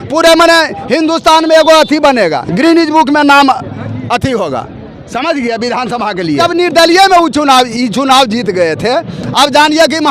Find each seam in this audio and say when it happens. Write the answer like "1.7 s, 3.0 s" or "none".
6.4 s